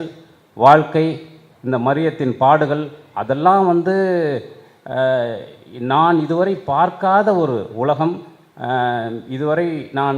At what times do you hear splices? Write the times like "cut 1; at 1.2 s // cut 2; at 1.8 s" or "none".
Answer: none